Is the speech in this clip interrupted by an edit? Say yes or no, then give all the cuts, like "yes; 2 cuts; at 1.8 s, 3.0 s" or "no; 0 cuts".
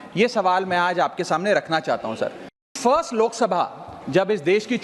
yes; 1 cut; at 2.8 s